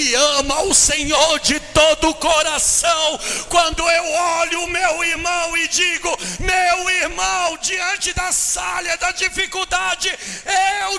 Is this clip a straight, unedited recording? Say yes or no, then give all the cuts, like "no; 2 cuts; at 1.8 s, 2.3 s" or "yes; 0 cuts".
yes; 0 cuts